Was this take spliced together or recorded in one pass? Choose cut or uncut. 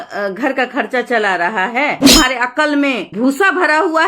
cut